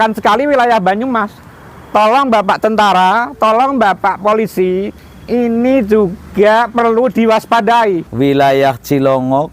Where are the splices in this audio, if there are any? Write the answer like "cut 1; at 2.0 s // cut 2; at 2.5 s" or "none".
cut 1; at 8.1 s